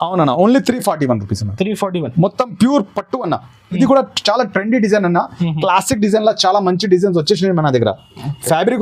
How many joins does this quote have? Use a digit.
1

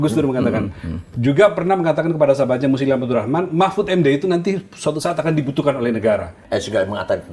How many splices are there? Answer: 1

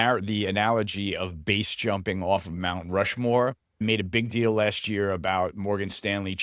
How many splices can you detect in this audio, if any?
1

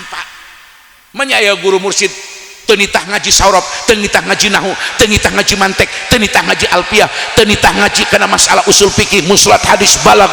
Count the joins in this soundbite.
0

